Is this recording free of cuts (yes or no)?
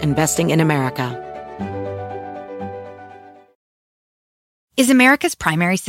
no